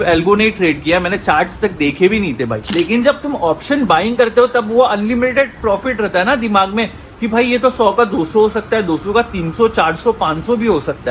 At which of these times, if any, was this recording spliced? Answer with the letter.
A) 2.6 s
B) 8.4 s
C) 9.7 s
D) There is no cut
A